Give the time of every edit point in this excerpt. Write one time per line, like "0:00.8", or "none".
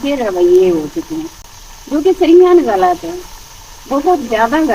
none